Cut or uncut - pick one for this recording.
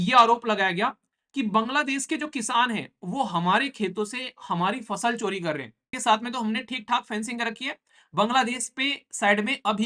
cut